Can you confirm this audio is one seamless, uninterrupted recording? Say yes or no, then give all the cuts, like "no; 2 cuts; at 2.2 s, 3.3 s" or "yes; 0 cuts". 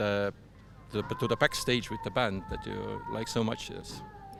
yes; 0 cuts